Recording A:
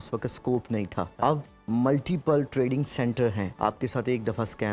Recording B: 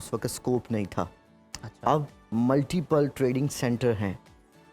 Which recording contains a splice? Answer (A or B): A